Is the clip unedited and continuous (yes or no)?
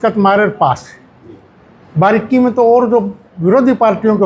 yes